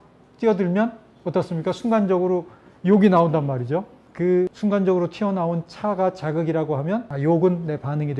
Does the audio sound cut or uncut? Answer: cut